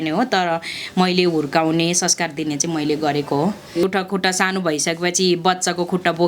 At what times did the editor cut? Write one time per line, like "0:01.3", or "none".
0:03.8